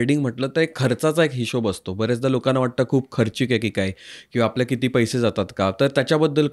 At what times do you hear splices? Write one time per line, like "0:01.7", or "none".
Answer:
none